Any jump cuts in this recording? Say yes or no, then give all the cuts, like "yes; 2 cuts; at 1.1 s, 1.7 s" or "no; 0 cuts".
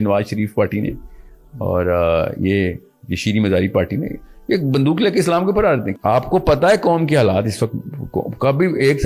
yes; 1 cut; at 5.9 s